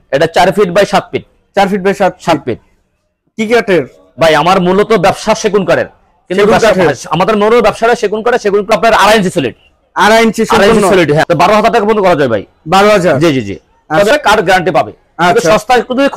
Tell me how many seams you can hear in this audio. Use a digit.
3